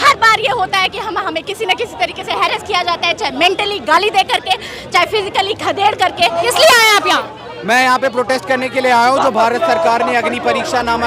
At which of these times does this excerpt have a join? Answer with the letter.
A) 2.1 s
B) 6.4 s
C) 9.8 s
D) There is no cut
B